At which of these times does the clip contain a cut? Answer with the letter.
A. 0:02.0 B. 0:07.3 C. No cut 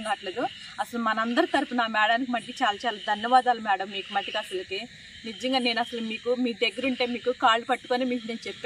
C